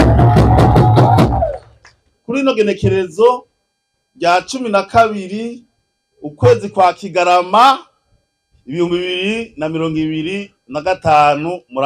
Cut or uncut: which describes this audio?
cut